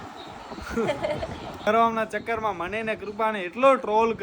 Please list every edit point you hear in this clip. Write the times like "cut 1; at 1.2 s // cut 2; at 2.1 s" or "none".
cut 1; at 1.7 s